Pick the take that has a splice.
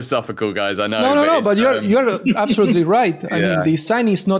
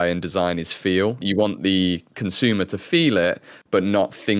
second; 1 cut; at 1.2 s

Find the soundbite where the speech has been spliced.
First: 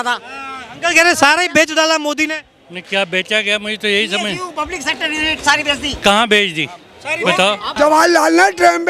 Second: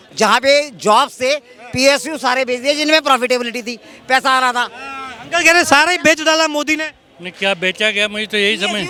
first; 1 cut; at 7.7 s

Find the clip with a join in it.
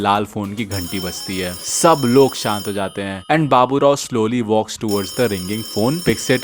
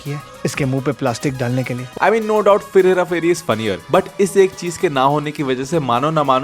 second; 1 cut; at 1.9 s

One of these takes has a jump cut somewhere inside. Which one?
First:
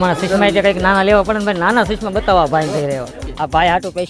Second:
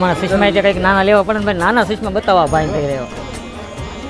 first; 1 cut; at 3.2 s

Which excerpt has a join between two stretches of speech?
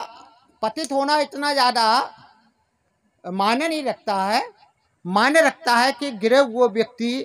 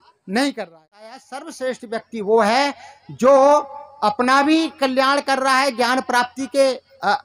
second; 1 cut; at 1.2 s

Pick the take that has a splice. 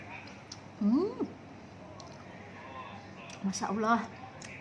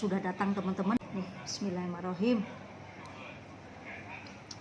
second; 1 cut; at 1.0 s

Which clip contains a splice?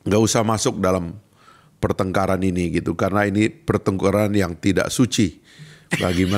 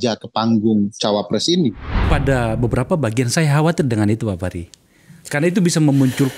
second; 1 cut; at 2.1 s

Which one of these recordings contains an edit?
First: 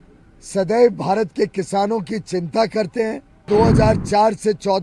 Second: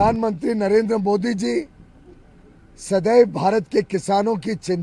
first; 1 cut; at 3.4 s

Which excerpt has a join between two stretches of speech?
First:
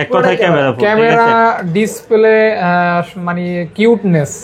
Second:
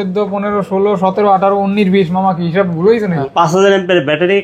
second; 1 cut; at 3.2 s

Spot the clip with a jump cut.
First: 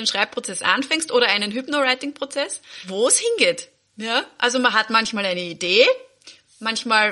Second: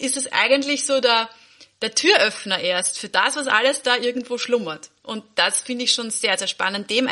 first; 1 cut; at 2.8 s

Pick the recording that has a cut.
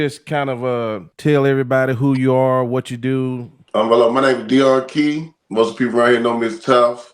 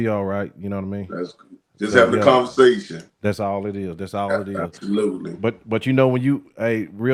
first; 1 cut; at 5.3 s

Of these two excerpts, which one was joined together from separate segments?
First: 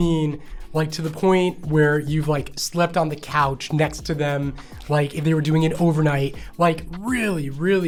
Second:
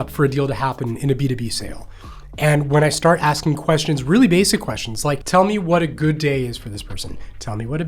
second; 2 cuts; at 1.0 s, 5.2 s

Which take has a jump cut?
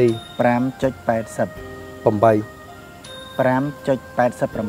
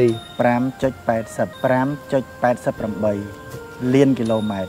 second; 1 cut; at 1.5 s

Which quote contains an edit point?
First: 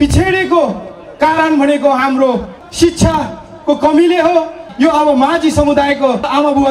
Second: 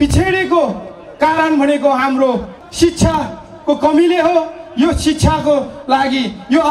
first; 1 cut; at 4.6 s

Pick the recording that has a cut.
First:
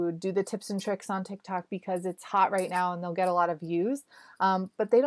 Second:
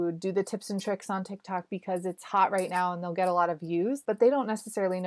second; 1 cut; at 4.0 s

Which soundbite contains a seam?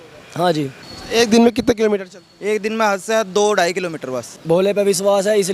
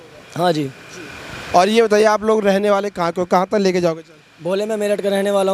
first; 2 cuts; at 0.9 s, 4.4 s

